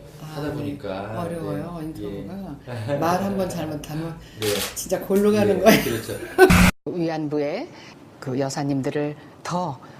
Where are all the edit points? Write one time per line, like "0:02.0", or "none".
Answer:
0:07.2